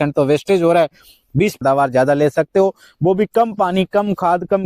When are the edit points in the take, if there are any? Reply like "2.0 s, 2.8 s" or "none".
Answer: 1.6 s